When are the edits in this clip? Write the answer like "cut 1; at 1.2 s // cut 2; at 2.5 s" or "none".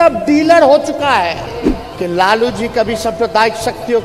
cut 1; at 1.5 s